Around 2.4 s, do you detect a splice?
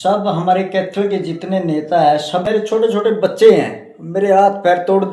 yes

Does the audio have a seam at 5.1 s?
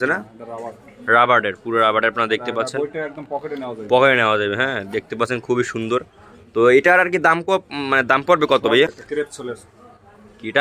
no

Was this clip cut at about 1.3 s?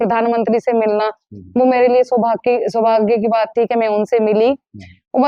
no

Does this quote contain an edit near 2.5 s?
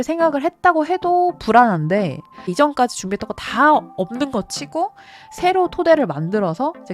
yes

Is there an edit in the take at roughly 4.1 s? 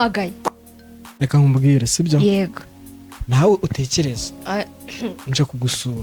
no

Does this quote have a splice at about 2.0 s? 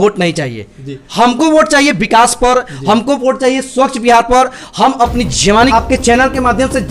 no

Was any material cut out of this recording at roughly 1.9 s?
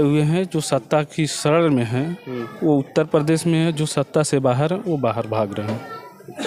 no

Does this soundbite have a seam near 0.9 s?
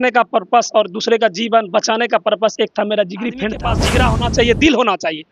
no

